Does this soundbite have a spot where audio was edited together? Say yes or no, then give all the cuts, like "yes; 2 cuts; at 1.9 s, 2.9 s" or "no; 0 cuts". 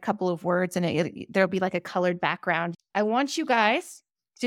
yes; 1 cut; at 2.8 s